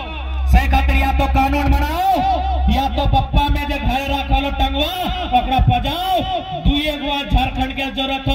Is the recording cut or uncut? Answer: uncut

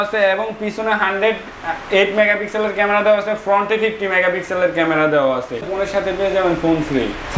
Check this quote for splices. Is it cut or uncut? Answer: cut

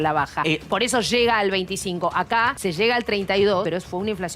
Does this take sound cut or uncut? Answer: cut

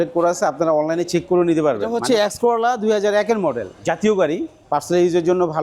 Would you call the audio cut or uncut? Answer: cut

